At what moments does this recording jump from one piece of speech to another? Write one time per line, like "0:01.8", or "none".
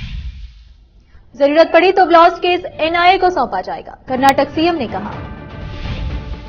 0:01.0